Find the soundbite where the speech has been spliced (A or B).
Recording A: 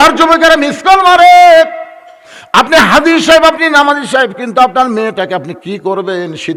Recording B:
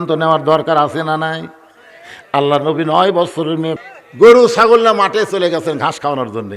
B